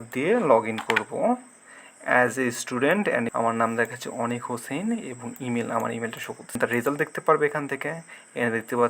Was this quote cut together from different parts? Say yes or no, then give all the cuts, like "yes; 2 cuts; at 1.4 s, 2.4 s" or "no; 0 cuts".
yes; 2 cuts; at 3.3 s, 6.6 s